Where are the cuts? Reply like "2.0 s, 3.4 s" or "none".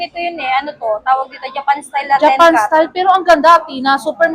none